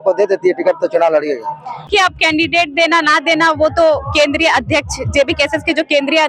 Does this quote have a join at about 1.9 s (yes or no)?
yes